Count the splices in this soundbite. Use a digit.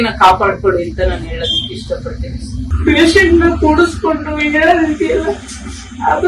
1